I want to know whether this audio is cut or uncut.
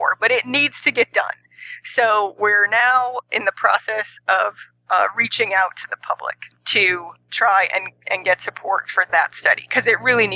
cut